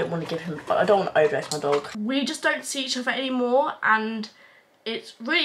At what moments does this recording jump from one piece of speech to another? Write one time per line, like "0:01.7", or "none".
0:01.9